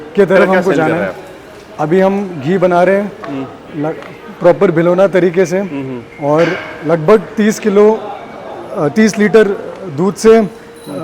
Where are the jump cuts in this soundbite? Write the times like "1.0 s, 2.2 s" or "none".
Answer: 1.0 s